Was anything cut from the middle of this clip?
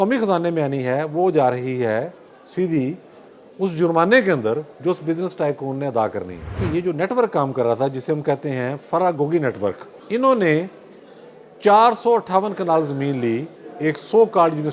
yes; 2 cuts; at 6.6 s, 9.9 s

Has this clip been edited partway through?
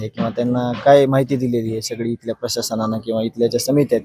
no; 0 cuts

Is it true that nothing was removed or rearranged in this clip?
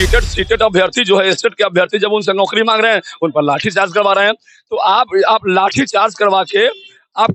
yes; 0 cuts

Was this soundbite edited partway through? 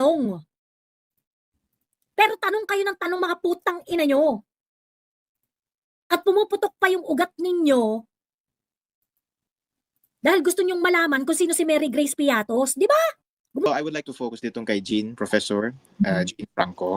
yes; 1 cut; at 13.7 s

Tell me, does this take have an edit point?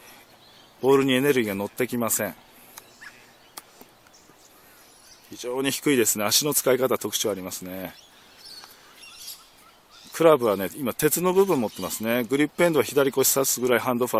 yes; 1 cut; at 8.2 s

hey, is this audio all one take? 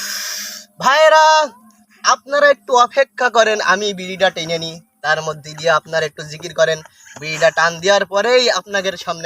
yes; 0 cuts

